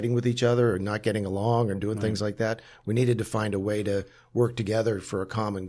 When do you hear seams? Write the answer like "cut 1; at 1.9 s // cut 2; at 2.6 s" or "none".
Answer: none